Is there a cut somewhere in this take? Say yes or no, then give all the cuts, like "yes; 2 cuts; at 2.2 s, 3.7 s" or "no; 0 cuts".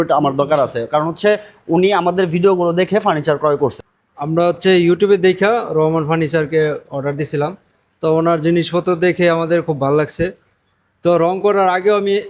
yes; 1 cut; at 3.8 s